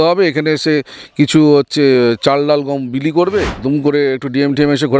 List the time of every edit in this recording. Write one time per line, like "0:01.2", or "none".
0:03.5